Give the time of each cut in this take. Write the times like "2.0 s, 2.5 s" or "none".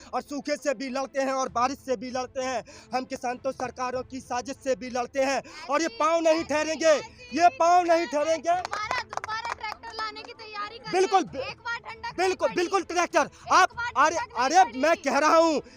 8.6 s